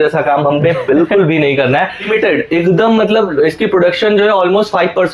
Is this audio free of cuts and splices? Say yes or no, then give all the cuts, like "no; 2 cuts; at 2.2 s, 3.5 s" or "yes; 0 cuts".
no; 1 cut; at 2.1 s